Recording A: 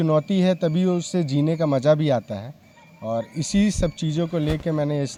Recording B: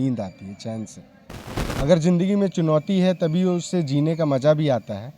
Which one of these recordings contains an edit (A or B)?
B